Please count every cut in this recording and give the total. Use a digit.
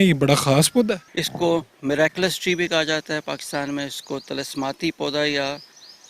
1